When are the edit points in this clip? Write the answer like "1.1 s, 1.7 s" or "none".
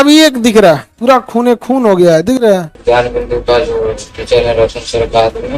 0.9 s, 2.7 s

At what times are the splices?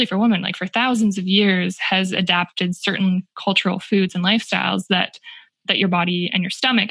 none

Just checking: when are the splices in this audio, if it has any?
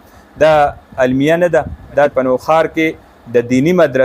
2.1 s

